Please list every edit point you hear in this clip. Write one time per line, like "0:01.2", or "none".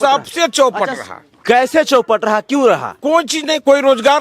none